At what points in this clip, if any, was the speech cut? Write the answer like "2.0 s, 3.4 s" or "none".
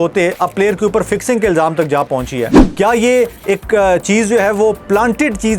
2.6 s